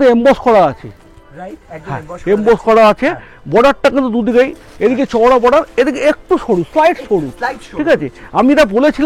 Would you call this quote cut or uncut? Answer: uncut